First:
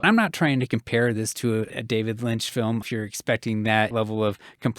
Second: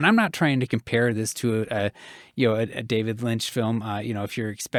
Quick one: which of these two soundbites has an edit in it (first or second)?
first